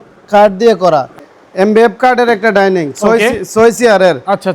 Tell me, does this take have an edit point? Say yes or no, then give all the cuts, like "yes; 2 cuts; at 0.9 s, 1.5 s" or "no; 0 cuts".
yes; 1 cut; at 1.2 s